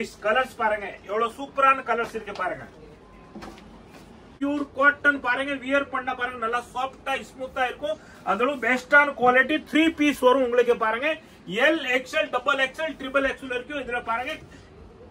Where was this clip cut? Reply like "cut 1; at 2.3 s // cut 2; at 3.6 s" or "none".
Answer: cut 1; at 4.3 s